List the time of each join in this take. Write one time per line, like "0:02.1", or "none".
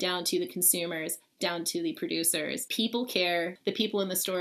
0:02.6
0:03.6